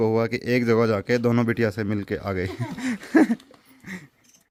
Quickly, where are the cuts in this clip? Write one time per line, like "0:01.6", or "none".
none